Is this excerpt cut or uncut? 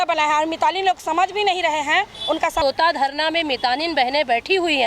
cut